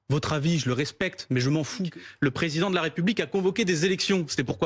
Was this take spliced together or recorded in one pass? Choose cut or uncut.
cut